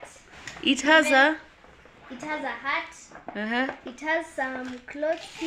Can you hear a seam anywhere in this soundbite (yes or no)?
no